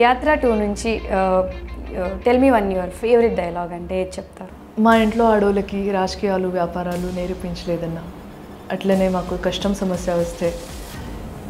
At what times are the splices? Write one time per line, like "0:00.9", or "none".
0:04.5